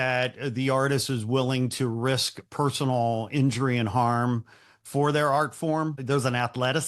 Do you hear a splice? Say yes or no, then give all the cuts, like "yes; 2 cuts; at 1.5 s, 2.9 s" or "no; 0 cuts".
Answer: yes; 1 cut; at 6.0 s